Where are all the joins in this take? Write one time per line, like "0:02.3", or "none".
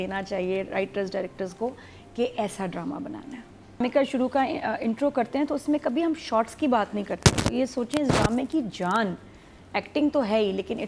0:03.8